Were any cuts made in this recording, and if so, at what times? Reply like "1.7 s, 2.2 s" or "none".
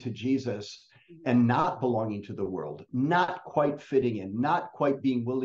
none